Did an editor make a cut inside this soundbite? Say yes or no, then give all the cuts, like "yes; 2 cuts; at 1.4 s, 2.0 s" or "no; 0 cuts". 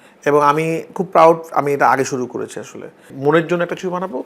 yes; 1 cut; at 3.1 s